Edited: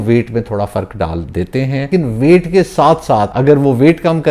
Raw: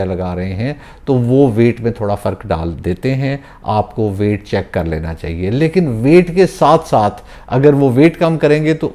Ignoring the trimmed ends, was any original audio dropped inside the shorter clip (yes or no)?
yes